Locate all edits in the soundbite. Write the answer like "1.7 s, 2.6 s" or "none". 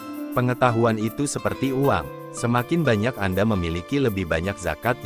none